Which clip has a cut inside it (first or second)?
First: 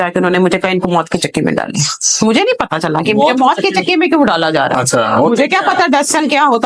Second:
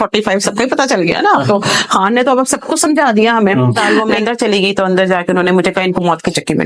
second